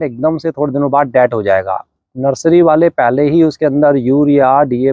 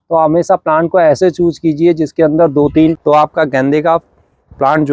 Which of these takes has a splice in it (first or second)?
second